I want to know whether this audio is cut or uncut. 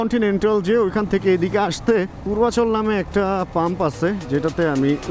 uncut